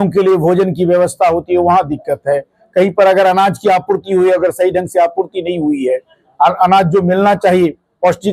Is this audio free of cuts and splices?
yes; 0 cuts

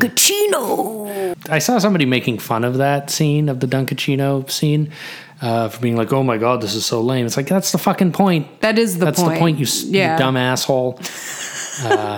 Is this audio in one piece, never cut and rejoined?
no; 1 cut; at 1.3 s

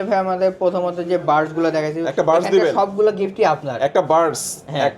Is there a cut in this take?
no; 0 cuts

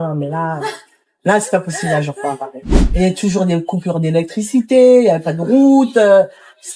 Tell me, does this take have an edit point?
yes; 1 cut; at 2.6 s

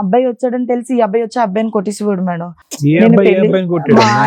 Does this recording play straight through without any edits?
yes; 0 cuts

